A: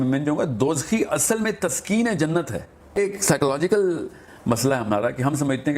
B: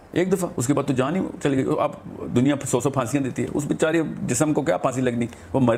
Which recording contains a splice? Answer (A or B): A